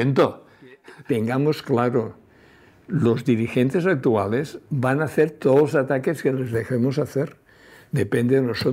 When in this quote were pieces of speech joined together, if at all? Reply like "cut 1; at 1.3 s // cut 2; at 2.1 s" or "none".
cut 1; at 0.9 s